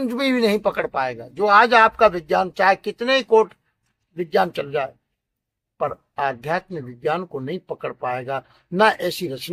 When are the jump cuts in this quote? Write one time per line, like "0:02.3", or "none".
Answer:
none